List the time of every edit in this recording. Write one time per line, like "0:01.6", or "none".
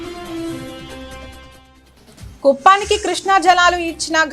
0:02.3